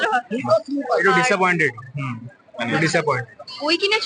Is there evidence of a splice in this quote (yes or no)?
no